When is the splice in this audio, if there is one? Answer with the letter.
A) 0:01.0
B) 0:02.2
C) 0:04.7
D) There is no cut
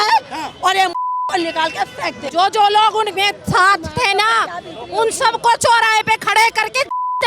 B